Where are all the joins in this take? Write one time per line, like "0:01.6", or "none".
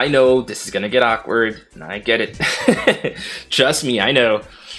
none